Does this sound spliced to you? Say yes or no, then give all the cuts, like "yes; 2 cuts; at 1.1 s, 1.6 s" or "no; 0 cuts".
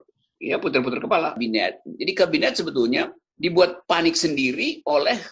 yes; 1 cut; at 1.4 s